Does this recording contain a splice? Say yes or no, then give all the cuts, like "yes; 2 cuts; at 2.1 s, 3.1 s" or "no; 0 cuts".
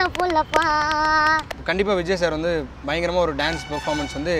yes; 1 cut; at 1.6 s